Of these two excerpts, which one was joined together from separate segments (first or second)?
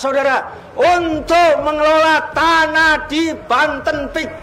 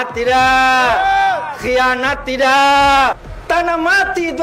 second